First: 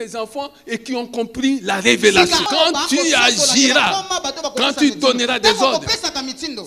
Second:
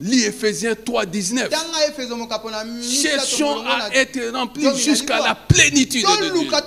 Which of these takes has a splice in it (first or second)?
first